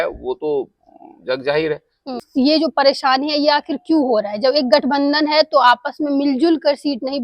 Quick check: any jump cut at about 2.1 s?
yes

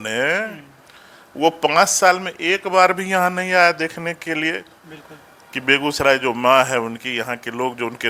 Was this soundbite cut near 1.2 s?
no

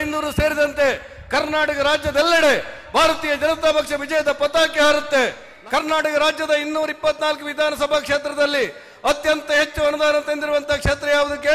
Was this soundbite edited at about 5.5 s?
yes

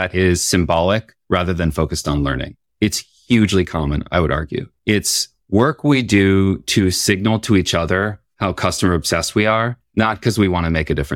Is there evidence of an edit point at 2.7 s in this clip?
yes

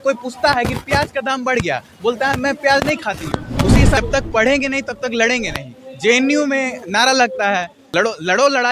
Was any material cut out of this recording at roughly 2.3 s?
no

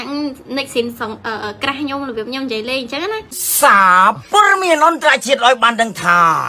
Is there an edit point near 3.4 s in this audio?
yes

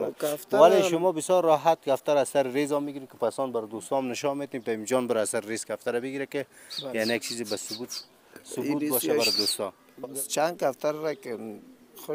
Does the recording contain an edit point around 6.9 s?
no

